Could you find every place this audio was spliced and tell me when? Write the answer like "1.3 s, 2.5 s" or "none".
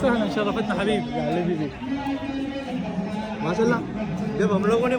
none